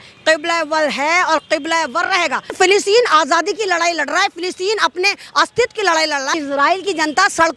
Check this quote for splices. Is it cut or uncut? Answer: cut